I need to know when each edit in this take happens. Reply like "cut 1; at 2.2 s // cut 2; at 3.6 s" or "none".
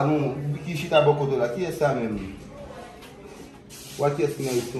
cut 1; at 3.5 s